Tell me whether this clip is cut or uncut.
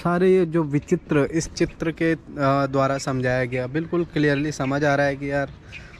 uncut